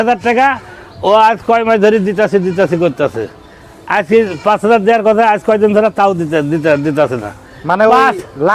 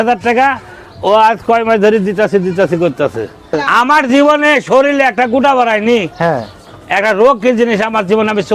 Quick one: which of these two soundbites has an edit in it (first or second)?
second